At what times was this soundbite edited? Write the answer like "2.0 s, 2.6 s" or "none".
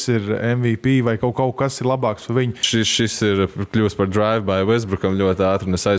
2.6 s